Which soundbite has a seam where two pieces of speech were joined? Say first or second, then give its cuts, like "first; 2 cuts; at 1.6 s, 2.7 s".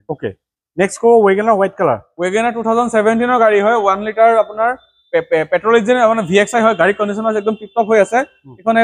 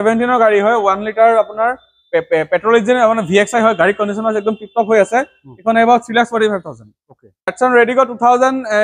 second; 1 cut; at 7.5 s